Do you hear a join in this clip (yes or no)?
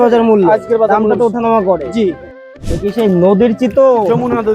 yes